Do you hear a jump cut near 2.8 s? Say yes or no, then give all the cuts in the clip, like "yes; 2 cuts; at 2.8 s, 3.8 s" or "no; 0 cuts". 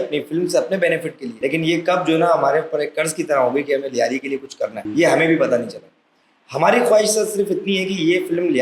no; 2 cuts; at 1.4 s, 4.8 s